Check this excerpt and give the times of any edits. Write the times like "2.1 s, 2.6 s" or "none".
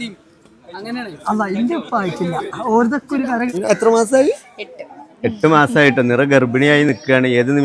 3.5 s